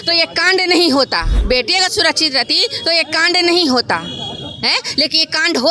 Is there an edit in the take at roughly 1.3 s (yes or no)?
yes